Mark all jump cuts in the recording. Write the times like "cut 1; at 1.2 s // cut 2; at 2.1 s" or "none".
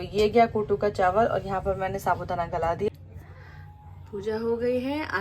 cut 1; at 2.9 s